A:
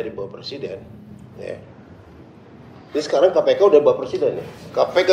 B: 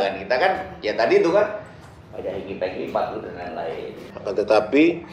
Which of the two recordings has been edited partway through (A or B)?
B